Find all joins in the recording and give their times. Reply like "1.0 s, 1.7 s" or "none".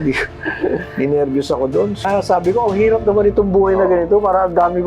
2.0 s